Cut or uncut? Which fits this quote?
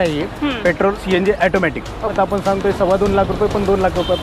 cut